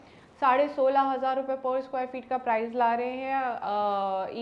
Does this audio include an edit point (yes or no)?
no